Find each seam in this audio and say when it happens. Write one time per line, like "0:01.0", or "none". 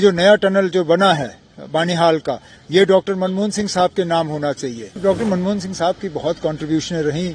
0:05.0